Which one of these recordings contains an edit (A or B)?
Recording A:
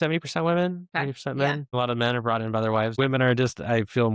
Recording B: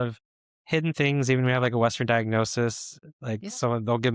A